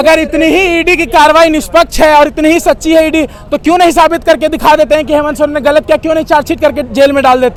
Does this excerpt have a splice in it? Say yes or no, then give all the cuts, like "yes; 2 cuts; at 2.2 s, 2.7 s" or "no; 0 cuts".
no; 0 cuts